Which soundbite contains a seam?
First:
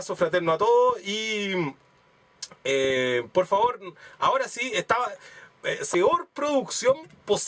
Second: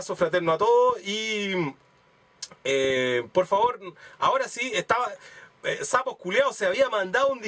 second; 1 cut; at 5.8 s

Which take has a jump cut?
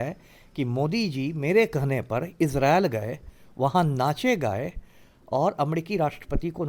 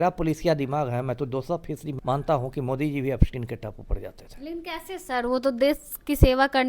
second; 1 cut; at 1.9 s

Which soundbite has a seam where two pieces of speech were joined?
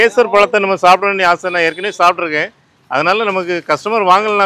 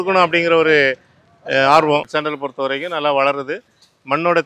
second; 1 cut; at 2.1 s

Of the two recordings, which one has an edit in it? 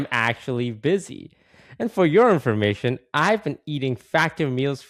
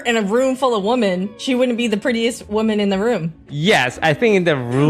second; 3 cuts; at 1.3 s, 2.4 s, 3.5 s

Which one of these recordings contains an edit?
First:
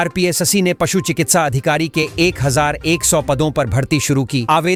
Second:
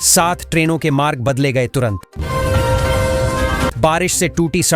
second; 2 cuts; at 2.2 s, 3.7 s

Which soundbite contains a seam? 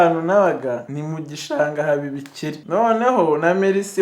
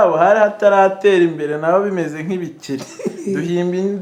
first; 2 cuts; at 0.9 s, 2.6 s

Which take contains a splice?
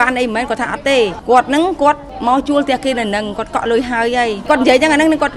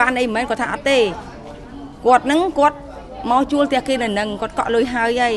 first; 3 cuts; at 1.2 s, 2.1 s, 4.4 s

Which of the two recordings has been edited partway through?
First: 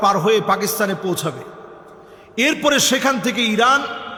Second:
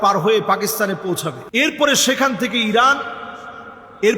second; 1 cut; at 1.4 s

